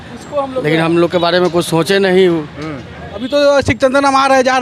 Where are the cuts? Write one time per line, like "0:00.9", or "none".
0:03.1